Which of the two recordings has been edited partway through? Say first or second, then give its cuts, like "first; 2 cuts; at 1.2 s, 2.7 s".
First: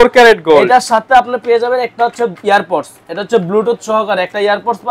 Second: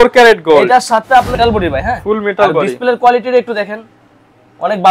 second; 1 cut; at 1.4 s